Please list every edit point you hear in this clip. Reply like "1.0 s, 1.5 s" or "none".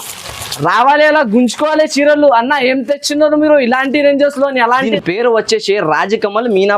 4.9 s